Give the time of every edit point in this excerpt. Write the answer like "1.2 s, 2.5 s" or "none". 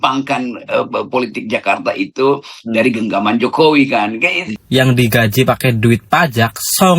4.5 s

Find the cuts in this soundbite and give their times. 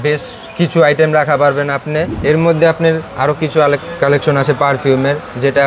2.1 s

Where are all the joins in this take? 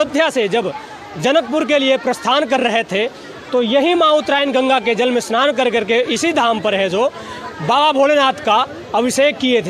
none

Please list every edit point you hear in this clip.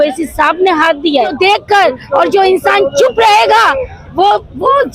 1.3 s

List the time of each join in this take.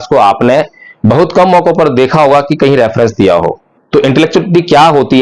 3.7 s

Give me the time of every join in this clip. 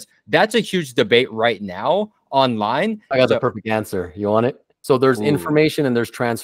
3.1 s, 4.7 s

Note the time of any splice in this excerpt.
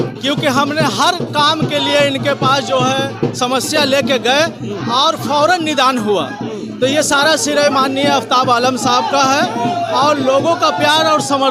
none

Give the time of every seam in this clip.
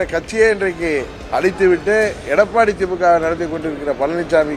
1.2 s

